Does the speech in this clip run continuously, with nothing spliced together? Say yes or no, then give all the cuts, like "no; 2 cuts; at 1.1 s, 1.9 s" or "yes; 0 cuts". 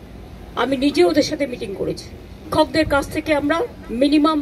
no; 1 cut; at 2.5 s